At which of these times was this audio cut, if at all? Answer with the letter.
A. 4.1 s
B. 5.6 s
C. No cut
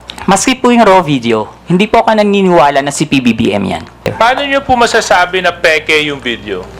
A